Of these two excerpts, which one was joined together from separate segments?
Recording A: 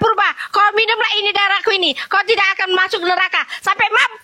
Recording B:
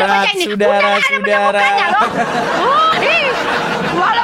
B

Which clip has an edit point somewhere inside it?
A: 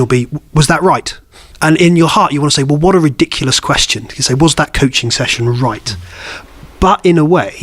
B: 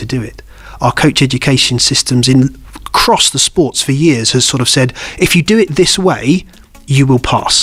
A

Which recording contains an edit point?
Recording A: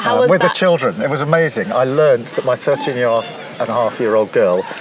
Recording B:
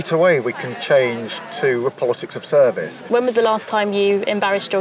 B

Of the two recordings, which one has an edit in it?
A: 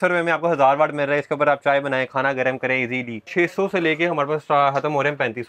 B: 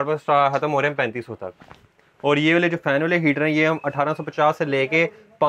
A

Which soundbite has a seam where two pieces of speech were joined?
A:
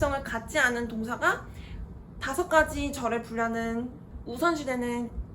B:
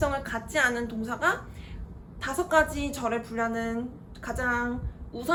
A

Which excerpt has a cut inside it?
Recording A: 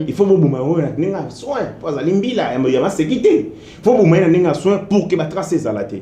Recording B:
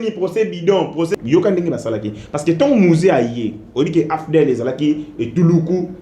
B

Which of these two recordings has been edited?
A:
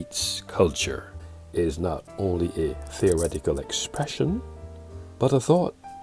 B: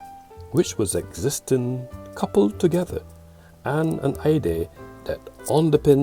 A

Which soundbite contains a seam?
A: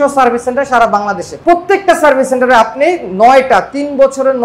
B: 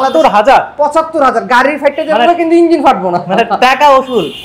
A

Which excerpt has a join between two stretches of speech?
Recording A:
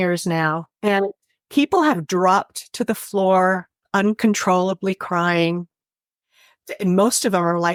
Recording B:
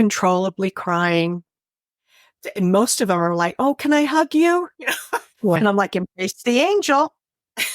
B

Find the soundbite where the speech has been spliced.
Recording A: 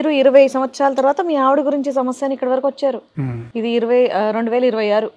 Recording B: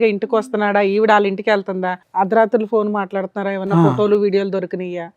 B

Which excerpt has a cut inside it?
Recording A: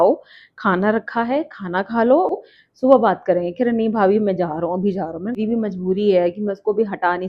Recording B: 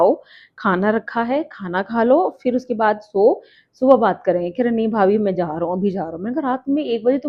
A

